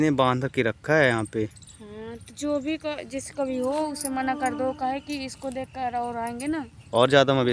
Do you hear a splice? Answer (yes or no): no